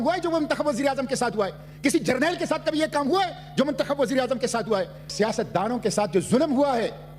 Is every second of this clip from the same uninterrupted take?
yes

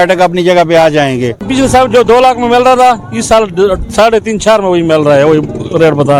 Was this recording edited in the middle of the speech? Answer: yes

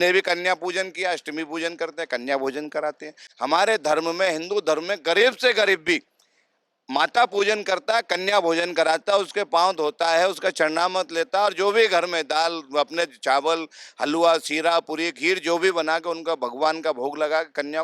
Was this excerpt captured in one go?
yes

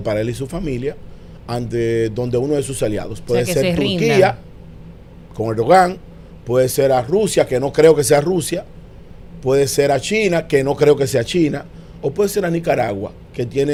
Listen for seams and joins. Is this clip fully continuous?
yes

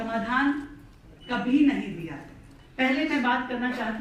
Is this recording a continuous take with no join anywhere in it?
no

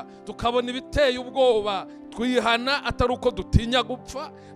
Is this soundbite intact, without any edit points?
no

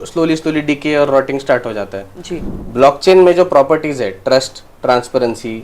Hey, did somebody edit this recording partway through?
yes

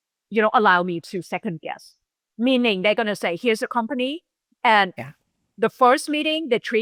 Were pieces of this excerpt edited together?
no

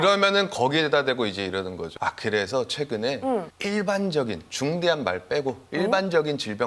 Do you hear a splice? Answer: no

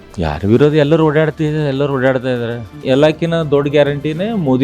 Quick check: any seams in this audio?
yes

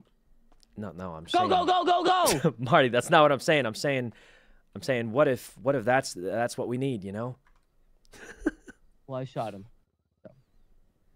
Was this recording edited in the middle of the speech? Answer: no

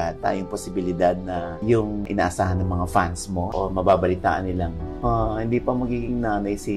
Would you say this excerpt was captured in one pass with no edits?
no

